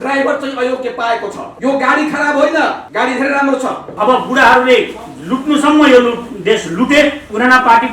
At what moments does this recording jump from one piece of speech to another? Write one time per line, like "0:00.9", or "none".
0:01.4
0:02.8
0:03.9